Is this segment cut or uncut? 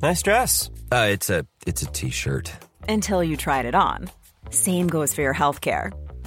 uncut